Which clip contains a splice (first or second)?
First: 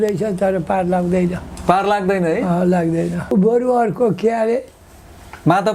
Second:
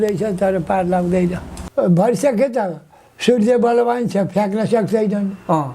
second